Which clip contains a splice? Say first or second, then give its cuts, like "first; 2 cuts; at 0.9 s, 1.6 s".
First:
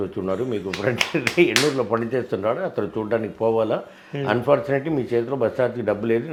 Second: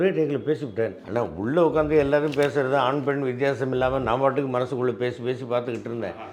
second; 1 cut; at 1.0 s